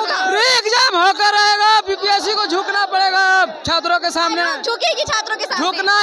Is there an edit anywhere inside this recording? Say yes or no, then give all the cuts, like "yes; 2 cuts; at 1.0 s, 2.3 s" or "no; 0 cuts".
no; 0 cuts